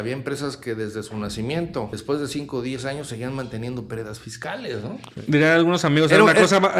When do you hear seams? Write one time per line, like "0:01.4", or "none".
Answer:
0:02.0
0:05.1